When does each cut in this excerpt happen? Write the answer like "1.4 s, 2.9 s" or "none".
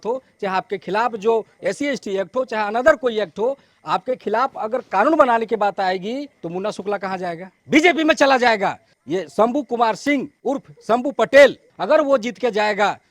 6.4 s, 7.5 s, 8.9 s, 10.3 s, 11.7 s